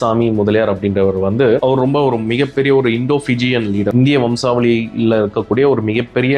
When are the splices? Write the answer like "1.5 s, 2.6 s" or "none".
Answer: 3.9 s